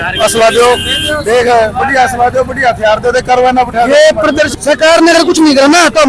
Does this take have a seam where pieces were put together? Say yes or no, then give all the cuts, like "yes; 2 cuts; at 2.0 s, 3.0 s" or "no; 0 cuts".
yes; 1 cut; at 4.5 s